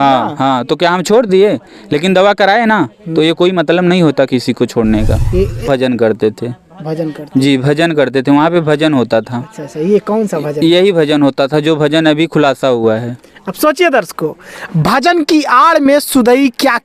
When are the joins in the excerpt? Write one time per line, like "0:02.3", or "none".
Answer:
0:05.7